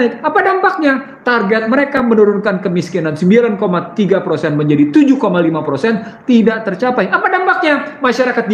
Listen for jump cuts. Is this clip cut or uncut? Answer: uncut